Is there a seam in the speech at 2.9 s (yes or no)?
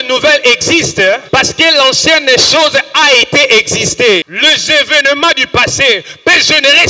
no